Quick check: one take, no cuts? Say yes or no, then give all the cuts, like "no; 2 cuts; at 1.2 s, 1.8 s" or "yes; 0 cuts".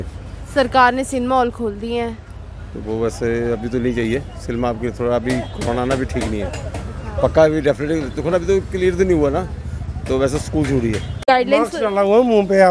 no; 1 cut; at 11.2 s